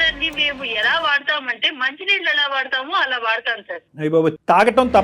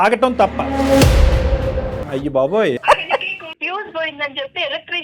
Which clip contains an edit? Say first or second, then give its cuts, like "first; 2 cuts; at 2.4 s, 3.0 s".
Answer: second; 2 cuts; at 2.0 s, 3.5 s